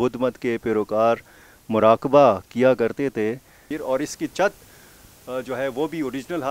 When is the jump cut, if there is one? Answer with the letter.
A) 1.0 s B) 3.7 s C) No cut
B